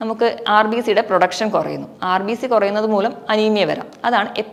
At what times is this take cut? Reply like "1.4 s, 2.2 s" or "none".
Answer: none